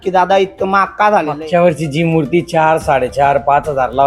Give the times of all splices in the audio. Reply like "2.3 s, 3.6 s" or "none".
1.3 s